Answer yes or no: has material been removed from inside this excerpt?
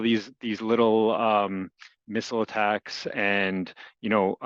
no